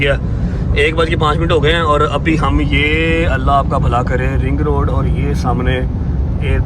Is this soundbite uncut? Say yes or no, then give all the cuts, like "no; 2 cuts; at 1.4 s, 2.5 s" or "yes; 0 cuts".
yes; 0 cuts